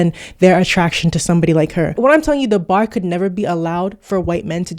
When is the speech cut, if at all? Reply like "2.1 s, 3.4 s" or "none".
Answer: 2.0 s